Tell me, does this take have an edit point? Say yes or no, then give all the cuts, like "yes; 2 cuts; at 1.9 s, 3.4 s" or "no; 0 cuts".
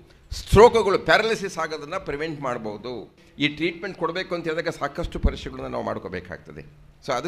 yes; 1 cut; at 3.2 s